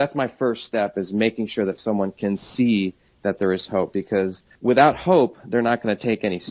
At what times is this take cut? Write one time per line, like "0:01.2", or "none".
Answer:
none

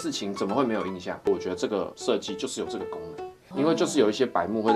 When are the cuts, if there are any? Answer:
0:01.1

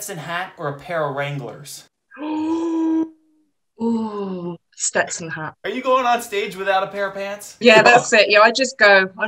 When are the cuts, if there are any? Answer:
0:05.5
0:07.6

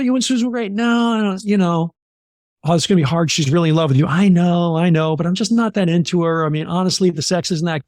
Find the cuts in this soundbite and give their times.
none

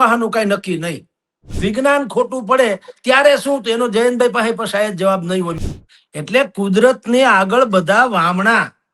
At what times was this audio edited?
0:01.5
0:05.6

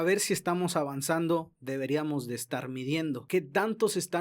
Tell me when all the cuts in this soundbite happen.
0:03.2

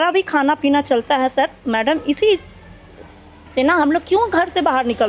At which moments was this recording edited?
none

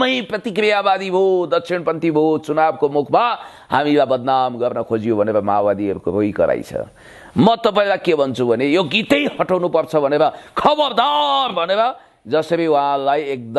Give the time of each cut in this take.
none

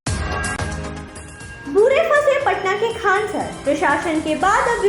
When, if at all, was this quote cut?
0:01.0

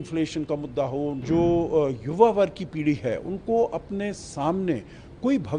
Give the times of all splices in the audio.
0:01.2

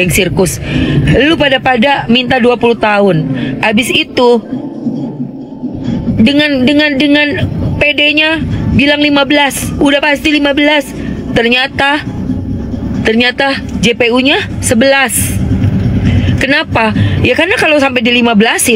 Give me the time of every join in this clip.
none

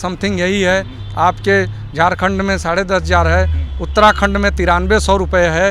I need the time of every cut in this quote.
none

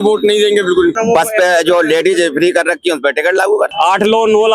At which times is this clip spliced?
0:00.9
0:03.7

